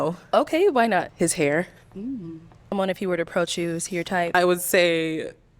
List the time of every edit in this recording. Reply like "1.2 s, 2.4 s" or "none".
1.1 s, 2.7 s, 4.3 s